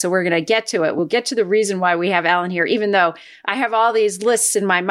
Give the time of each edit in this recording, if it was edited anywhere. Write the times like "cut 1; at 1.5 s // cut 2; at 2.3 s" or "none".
cut 1; at 1.0 s